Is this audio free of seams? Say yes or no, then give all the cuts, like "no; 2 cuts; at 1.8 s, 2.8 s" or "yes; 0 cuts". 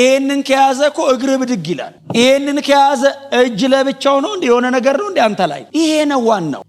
no; 1 cut; at 5.6 s